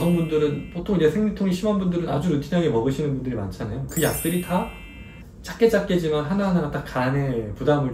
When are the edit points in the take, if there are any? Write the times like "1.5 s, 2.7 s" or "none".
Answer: none